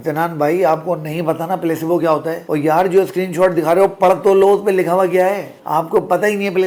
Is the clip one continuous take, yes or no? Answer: yes